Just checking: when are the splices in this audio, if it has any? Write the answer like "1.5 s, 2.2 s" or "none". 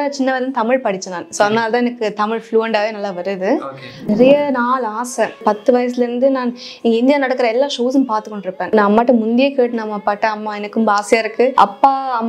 4.1 s, 5.4 s, 8.7 s, 11.5 s